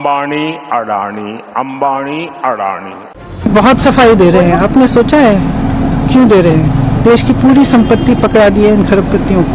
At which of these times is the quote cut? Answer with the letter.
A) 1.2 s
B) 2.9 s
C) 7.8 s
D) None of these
B